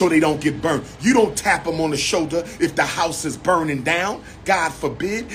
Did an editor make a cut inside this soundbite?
no; 0 cuts

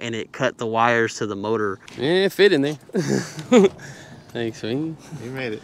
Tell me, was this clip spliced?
yes; 1 cut; at 1.9 s

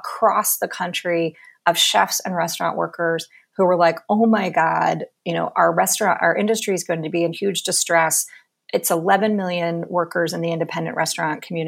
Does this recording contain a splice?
no; 0 cuts

